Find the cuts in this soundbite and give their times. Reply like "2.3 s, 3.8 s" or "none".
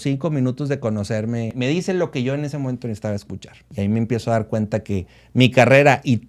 1.5 s, 3.7 s